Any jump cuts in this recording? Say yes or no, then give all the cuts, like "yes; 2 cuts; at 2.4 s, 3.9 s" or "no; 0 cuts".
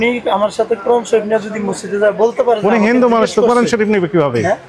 no; 0 cuts